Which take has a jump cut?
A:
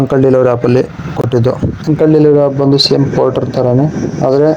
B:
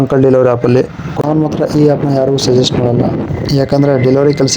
B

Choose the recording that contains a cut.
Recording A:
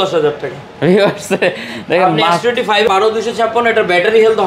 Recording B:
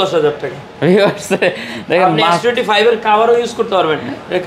A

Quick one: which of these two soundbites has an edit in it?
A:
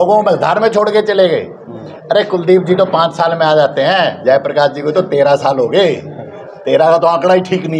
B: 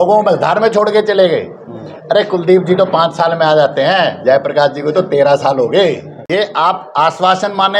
B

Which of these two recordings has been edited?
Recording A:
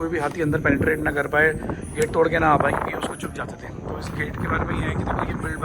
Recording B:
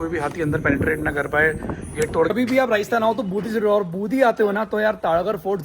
B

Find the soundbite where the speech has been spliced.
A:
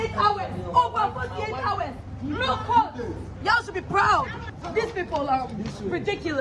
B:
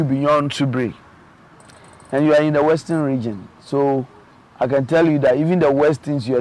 A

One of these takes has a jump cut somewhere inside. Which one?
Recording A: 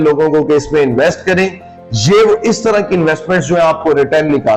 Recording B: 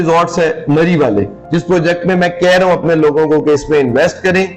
B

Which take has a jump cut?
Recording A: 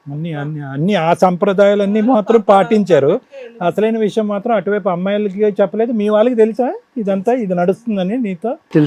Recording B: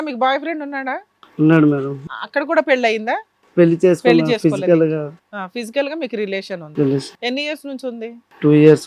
B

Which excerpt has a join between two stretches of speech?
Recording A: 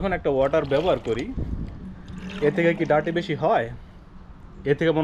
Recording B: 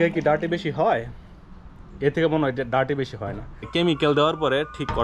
B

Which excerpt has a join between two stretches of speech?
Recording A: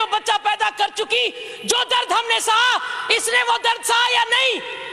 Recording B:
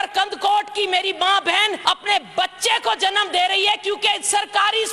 B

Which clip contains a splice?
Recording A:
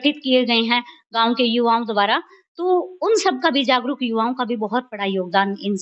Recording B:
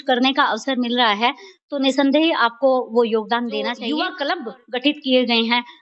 B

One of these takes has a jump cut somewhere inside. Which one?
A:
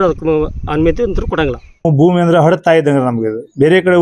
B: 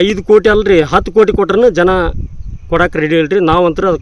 A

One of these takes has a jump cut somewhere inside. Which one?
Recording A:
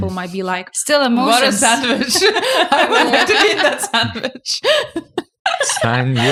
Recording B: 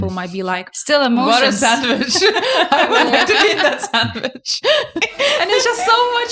B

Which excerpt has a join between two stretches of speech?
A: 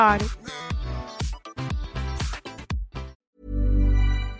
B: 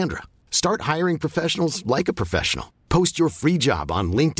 A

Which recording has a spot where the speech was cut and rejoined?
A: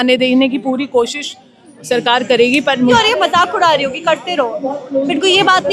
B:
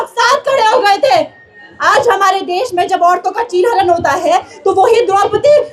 A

